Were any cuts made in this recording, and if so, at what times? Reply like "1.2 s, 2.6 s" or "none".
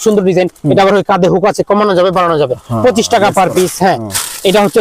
none